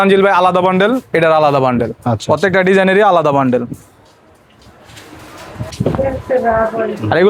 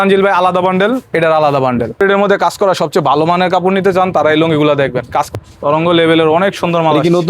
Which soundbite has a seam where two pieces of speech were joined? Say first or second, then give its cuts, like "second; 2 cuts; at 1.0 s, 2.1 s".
second; 2 cuts; at 1.9 s, 5.3 s